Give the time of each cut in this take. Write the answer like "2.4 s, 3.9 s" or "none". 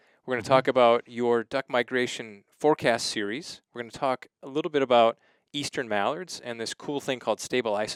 none